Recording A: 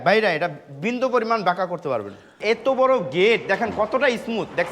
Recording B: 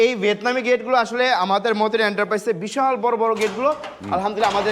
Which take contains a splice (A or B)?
A